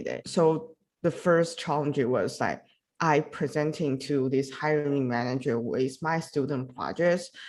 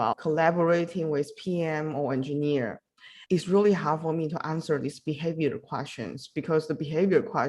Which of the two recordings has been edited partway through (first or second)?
second